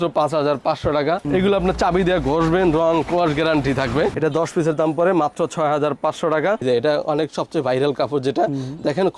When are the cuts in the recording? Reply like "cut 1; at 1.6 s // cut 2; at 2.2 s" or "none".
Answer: cut 1; at 1.2 s // cut 2; at 4.1 s // cut 3; at 6.6 s